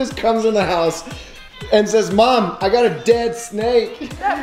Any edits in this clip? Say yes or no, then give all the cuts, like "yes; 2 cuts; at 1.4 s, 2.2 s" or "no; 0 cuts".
no; 0 cuts